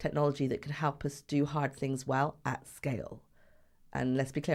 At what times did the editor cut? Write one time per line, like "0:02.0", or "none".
none